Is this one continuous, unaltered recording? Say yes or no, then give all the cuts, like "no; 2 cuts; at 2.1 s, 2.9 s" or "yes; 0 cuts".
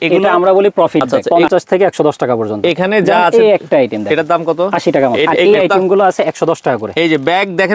no; 2 cuts; at 1.2 s, 5.4 s